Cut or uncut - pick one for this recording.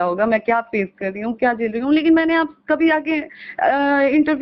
uncut